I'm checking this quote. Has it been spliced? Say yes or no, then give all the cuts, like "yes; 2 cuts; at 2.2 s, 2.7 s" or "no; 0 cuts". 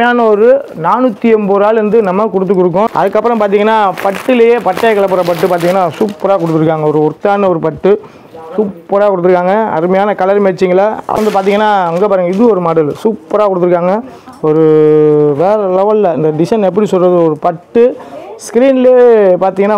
yes; 2 cuts; at 2.9 s, 11.2 s